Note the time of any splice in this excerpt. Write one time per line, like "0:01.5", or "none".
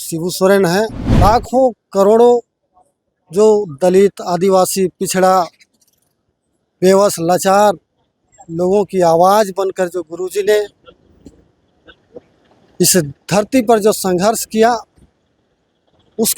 0:01.0